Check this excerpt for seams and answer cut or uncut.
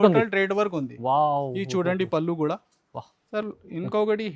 cut